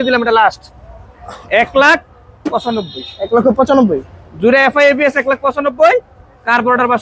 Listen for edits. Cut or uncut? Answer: uncut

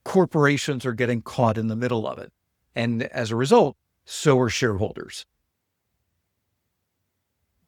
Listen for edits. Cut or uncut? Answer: uncut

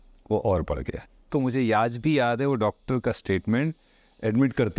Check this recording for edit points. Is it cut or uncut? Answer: cut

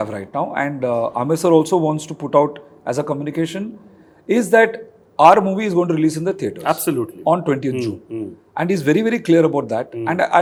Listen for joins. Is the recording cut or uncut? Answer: uncut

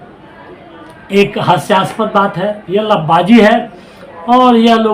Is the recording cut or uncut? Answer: cut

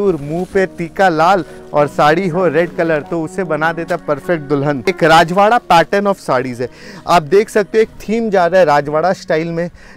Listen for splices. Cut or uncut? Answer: cut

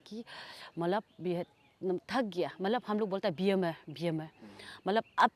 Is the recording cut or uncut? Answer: uncut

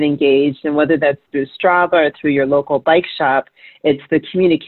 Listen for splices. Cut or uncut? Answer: uncut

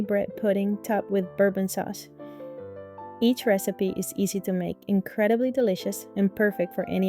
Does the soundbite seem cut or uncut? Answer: uncut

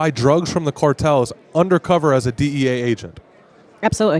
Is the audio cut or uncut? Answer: uncut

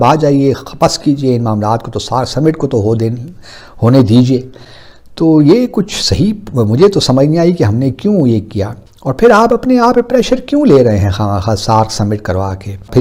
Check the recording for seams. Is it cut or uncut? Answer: uncut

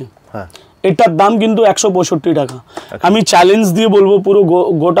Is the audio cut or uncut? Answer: uncut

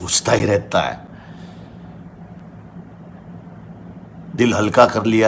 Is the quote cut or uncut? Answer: uncut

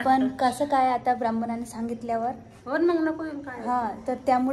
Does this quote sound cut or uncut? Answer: uncut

